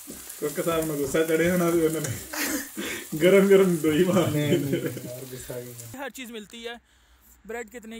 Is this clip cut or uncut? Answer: cut